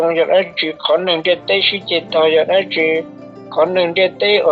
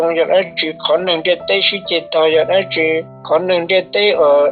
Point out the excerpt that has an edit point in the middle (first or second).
second